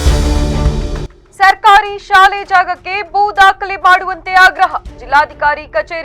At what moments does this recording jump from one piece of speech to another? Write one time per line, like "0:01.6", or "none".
0:01.1